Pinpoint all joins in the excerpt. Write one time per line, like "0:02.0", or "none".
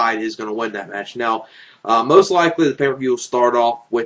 0:03.0